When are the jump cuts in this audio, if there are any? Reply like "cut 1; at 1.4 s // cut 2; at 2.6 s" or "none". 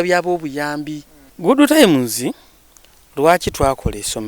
cut 1; at 1.3 s